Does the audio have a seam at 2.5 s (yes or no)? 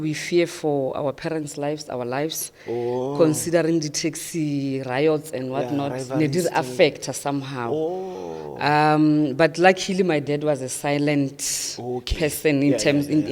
no